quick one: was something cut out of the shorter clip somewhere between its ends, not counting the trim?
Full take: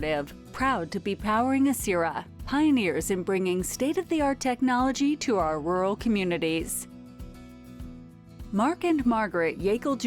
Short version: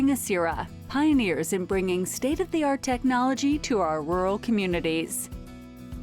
yes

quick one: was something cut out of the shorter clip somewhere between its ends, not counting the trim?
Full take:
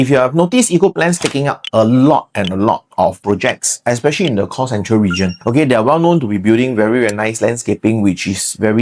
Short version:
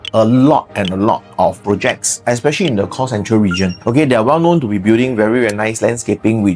no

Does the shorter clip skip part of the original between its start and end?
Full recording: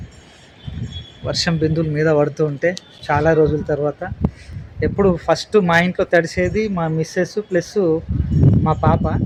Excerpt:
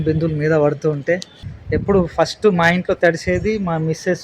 yes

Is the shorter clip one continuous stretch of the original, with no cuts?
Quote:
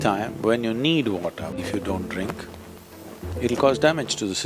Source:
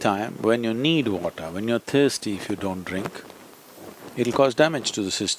no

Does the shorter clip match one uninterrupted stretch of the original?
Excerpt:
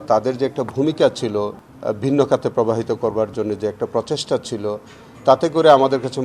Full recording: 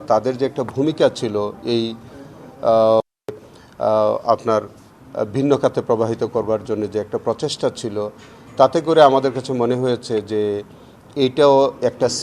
no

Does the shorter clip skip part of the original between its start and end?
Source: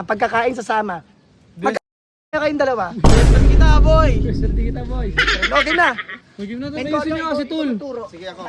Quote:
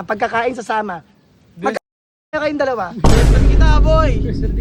no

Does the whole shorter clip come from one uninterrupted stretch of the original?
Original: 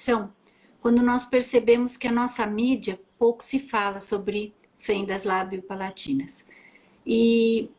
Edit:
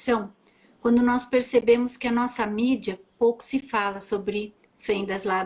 yes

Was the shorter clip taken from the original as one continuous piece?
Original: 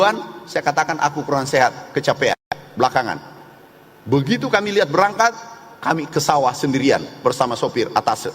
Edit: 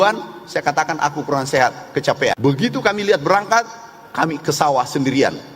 no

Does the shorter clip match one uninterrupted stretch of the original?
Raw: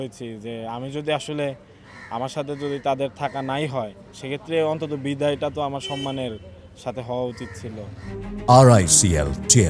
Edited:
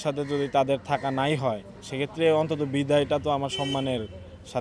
yes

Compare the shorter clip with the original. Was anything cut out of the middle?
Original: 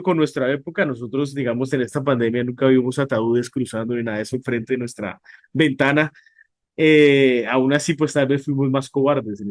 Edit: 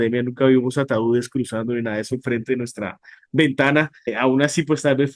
yes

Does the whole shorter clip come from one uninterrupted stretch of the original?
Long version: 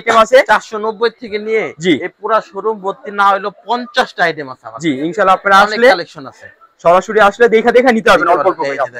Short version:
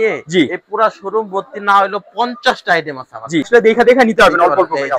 no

